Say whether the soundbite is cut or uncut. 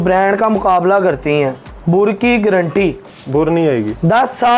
cut